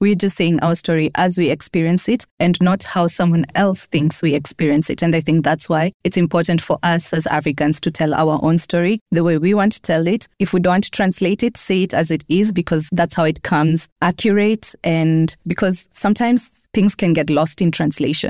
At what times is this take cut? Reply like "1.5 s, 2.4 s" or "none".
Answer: none